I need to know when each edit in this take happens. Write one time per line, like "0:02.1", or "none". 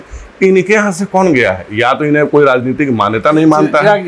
none